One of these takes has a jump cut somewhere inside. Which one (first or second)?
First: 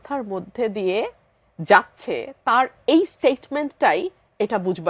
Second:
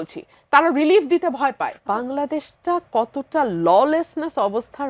second